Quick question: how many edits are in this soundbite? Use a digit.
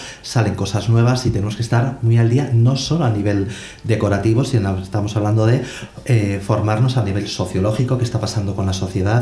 0